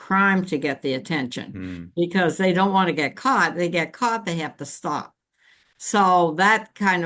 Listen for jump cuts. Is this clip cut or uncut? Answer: uncut